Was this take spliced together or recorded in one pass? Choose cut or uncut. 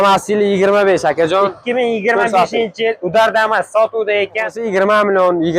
cut